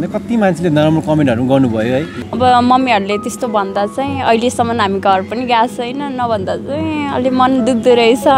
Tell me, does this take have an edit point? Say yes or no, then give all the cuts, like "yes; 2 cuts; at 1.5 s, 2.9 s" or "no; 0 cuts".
yes; 1 cut; at 2.2 s